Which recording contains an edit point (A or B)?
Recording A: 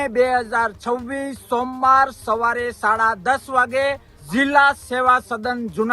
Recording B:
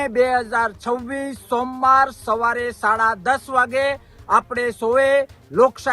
A